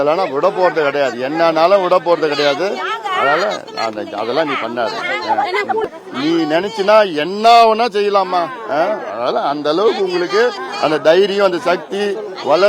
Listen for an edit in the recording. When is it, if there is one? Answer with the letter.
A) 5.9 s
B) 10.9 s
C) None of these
A